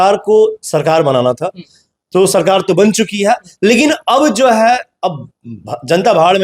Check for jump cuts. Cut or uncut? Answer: uncut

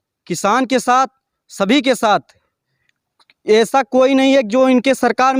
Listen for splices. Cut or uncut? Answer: uncut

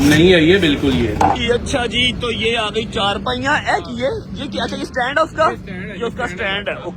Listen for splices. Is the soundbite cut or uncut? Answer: cut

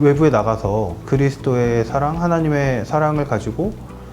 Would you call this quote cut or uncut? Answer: cut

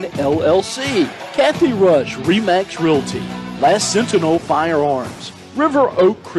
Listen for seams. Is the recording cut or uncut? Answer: cut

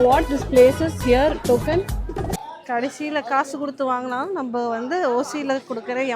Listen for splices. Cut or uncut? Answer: cut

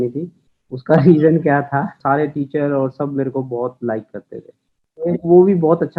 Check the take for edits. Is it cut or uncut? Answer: cut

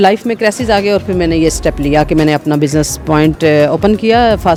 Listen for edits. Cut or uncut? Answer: uncut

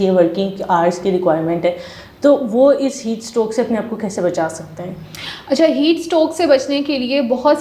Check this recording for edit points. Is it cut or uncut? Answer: uncut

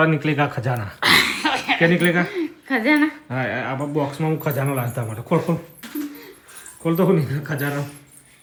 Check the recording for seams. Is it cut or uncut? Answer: uncut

